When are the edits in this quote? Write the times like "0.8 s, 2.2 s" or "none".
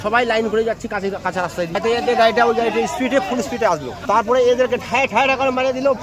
1.8 s, 3.9 s